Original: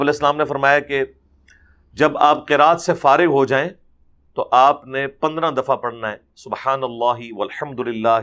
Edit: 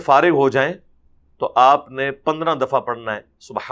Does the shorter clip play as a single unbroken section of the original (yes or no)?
yes